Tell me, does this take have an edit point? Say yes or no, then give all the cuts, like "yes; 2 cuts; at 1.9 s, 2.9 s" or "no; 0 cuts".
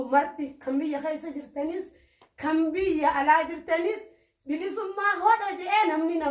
no; 0 cuts